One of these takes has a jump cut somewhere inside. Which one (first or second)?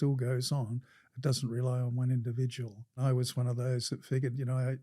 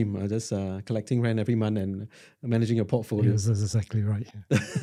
first